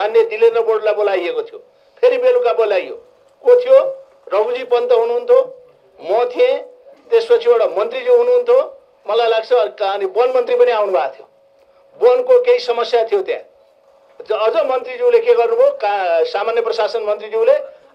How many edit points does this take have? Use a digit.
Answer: 1